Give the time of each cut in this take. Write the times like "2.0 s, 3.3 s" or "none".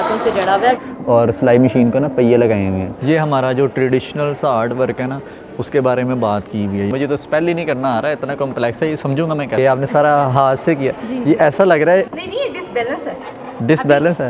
0.8 s, 2.9 s, 6.9 s, 9.6 s, 12.1 s